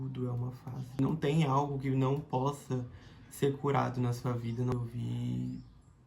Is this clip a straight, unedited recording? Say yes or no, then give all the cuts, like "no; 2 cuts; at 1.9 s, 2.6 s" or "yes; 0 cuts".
no; 2 cuts; at 1.0 s, 4.7 s